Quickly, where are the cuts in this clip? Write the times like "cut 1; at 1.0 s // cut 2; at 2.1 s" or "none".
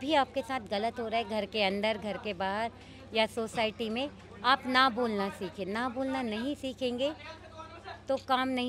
none